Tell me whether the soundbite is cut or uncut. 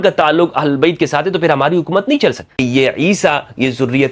cut